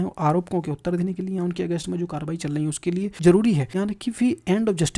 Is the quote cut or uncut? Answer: cut